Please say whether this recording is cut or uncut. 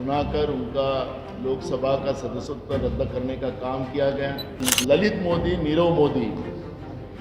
cut